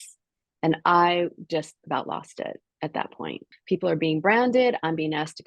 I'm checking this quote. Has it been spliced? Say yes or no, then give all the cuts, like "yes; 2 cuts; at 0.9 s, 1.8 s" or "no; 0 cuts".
yes; 1 cut; at 3.5 s